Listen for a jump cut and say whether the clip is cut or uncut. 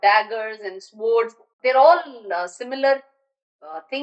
cut